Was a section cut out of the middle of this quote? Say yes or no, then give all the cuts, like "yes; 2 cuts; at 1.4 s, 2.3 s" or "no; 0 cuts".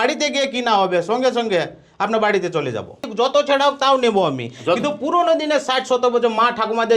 yes; 1 cut; at 3.0 s